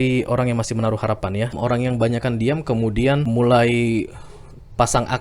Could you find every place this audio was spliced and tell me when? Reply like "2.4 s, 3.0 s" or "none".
1.5 s, 3.3 s